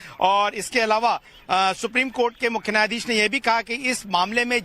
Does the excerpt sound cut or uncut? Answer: cut